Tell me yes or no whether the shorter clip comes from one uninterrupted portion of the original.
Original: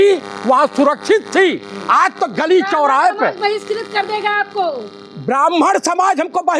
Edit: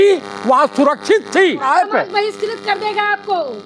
no